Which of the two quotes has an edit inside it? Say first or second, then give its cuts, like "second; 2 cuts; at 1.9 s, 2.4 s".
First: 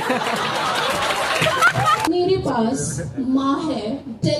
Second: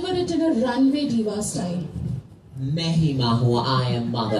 first; 1 cut; at 2.1 s